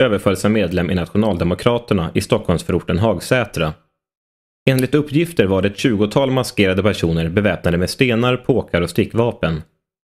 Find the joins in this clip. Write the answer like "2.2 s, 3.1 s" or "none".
2.4 s